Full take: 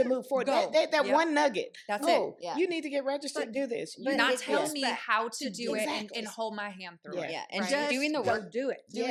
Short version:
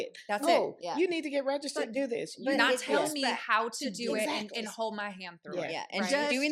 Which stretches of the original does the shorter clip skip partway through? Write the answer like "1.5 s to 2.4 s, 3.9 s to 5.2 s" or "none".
none

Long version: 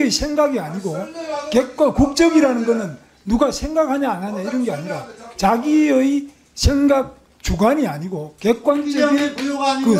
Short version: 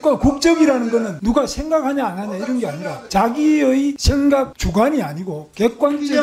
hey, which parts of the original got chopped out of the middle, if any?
2.9 s to 3.2 s, 5.0 s to 5.2 s, 6.6 s to 7.1 s

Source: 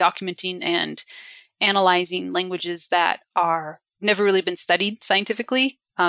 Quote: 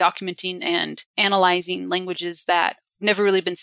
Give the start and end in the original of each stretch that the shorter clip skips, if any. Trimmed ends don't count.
1.0 s to 1.4 s, 3.2 s to 3.8 s

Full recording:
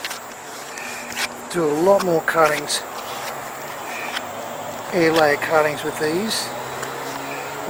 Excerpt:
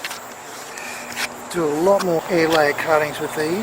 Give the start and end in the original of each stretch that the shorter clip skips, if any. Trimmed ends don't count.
2.2 s to 4.9 s

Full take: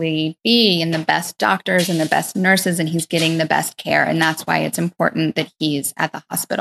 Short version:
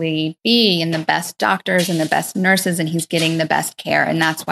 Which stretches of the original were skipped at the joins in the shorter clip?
none

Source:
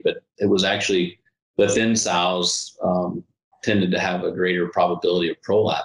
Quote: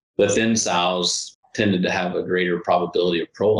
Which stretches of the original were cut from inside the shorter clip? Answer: 2.6 s to 3.3 s

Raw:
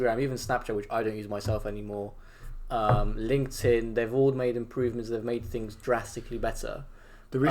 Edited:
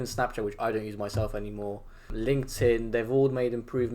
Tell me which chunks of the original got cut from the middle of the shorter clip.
2.4 s to 3.1 s

